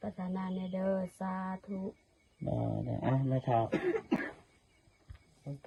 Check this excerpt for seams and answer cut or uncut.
uncut